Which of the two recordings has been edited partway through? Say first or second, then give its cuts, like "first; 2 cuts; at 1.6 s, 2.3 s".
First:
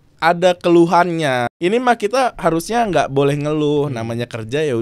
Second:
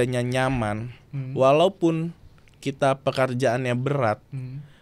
first; 1 cut; at 1.5 s